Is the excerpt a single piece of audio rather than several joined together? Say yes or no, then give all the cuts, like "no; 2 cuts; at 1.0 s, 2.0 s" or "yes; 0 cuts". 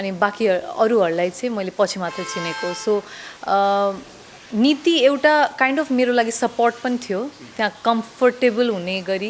yes; 0 cuts